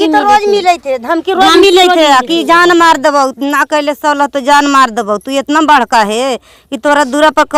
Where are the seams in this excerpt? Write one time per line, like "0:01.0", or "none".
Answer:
none